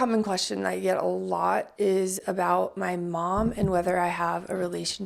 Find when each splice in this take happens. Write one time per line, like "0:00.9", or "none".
none